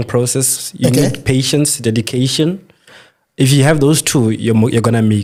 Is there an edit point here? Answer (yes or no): no